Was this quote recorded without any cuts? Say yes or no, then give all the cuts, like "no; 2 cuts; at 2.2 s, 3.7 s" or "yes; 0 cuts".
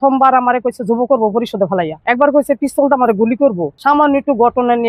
no; 2 cuts; at 2.0 s, 3.7 s